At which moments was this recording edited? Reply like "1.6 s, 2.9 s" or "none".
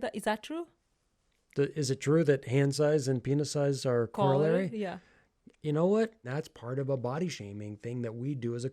4.1 s, 6.2 s